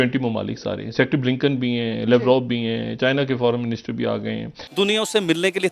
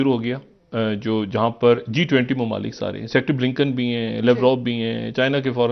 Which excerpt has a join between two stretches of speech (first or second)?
first